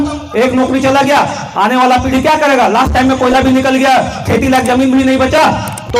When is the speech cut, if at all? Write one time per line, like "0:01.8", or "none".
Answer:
none

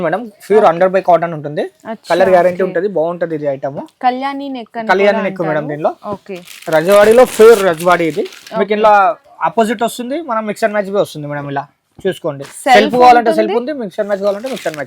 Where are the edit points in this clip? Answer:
none

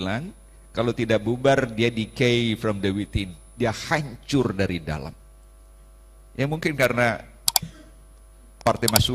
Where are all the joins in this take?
none

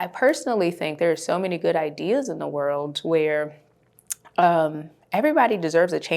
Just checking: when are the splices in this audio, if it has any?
none

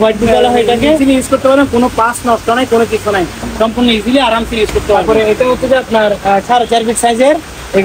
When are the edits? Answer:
0:01.0
0:05.0

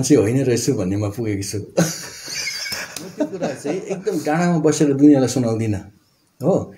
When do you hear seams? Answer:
0:03.9

